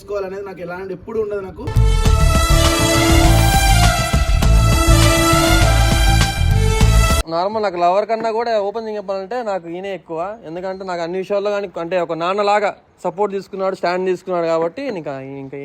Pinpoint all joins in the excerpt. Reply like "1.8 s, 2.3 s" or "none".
7.2 s